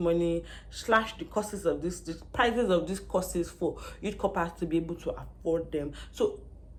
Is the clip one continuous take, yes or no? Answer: yes